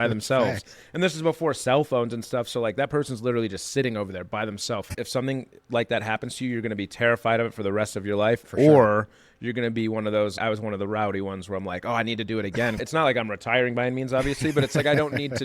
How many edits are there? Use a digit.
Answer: 3